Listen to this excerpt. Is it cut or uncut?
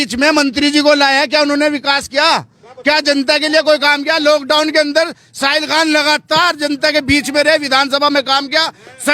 uncut